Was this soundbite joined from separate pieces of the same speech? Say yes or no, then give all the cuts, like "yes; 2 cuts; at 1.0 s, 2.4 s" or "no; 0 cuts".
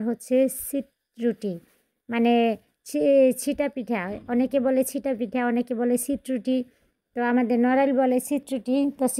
no; 0 cuts